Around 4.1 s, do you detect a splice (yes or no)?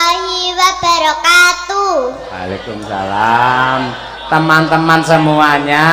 no